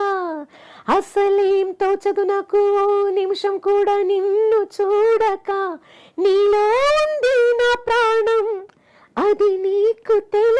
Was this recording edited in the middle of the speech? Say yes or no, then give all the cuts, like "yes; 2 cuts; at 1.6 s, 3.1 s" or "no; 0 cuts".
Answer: no; 0 cuts